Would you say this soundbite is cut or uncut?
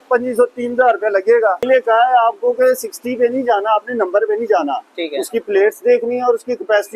cut